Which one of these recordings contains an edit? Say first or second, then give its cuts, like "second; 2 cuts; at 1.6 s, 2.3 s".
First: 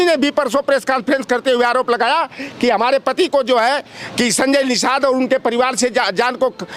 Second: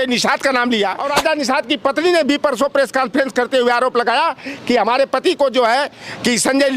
second; 1 cut; at 1.0 s